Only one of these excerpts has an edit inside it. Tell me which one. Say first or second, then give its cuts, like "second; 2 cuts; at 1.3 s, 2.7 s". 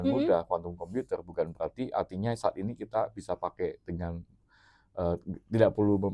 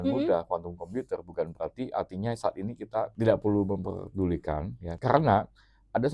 second; 2 cuts; at 3.1 s, 5.0 s